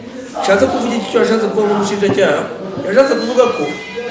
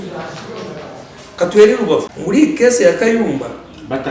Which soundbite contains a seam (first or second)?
second